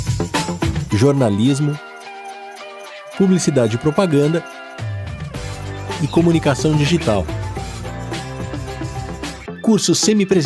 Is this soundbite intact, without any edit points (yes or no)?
yes